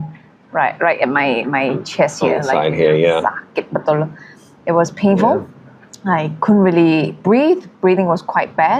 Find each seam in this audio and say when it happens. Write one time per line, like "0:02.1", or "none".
none